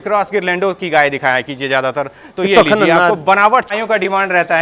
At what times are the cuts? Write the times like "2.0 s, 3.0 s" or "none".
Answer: 3.7 s